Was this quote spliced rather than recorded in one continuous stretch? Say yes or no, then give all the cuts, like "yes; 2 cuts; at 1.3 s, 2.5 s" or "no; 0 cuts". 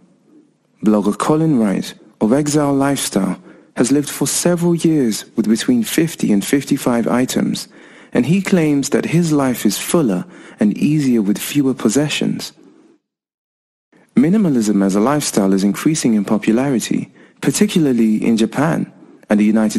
yes; 1 cut; at 16.5 s